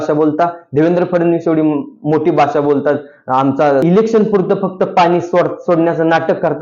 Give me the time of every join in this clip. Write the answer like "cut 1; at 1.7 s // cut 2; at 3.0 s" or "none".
cut 1; at 3.8 s